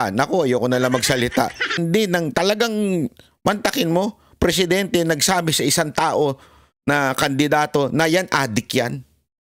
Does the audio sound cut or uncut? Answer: cut